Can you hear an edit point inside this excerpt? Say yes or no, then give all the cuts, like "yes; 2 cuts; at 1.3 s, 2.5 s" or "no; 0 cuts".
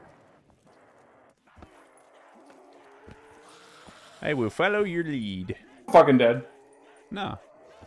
no; 0 cuts